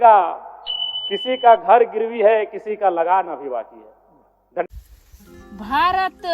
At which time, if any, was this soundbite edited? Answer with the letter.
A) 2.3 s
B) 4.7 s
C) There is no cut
B